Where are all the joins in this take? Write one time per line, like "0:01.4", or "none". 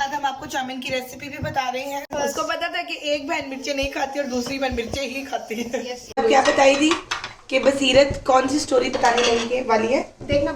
0:02.1
0:06.2